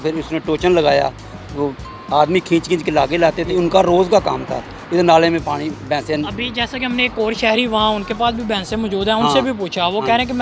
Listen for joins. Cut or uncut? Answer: cut